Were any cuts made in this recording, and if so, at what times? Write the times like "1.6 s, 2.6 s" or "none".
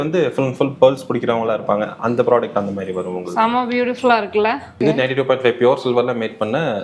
4.7 s